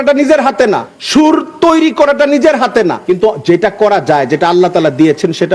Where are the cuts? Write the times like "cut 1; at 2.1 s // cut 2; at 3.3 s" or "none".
cut 1; at 0.9 s // cut 2; at 3.0 s

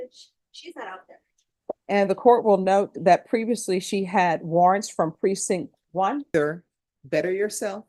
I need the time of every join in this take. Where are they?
cut 1; at 1.8 s // cut 2; at 6.3 s

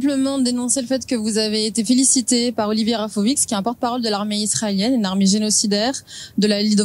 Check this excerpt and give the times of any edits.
none

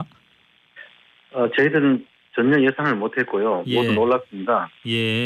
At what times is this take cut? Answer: cut 1; at 1.6 s

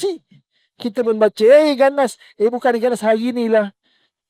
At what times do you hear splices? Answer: none

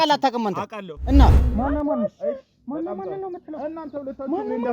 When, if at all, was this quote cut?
cut 1; at 1.4 s

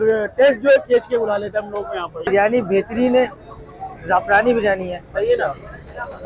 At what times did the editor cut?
cut 1; at 2.3 s

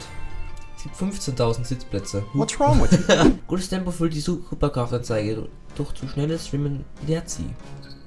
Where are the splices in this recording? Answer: cut 1; at 3.4 s

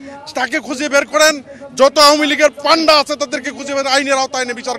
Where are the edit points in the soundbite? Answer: none

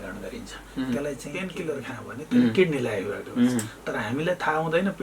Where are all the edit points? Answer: cut 1; at 1.6 s

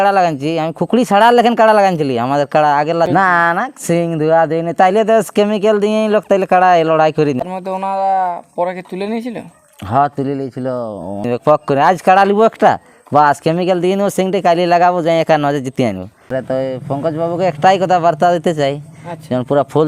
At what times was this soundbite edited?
cut 1; at 3.1 s // cut 2; at 7.4 s // cut 3; at 11.2 s // cut 4; at 16.2 s

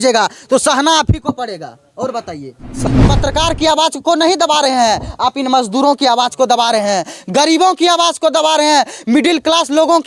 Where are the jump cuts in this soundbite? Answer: cut 1; at 2.8 s

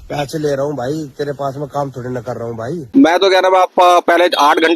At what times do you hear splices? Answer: cut 1; at 2.7 s

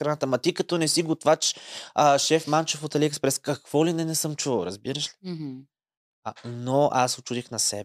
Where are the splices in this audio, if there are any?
none

